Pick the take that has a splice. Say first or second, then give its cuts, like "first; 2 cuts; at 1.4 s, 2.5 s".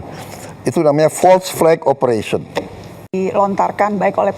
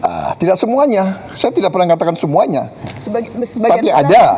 first; 1 cut; at 3.1 s